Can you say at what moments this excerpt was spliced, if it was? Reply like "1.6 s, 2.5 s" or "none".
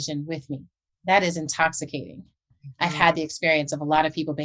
0.9 s, 2.6 s